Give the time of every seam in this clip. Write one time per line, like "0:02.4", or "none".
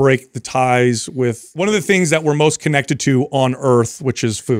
0:01.5